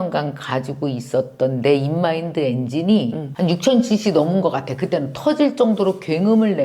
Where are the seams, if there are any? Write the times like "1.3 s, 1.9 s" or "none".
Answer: 3.3 s